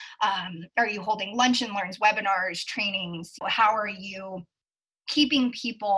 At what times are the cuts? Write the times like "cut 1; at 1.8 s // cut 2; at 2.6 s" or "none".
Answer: cut 1; at 3.3 s